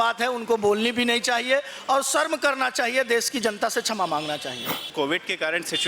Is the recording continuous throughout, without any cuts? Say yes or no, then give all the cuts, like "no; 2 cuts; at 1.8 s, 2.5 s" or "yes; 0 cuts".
no; 1 cut; at 4.9 s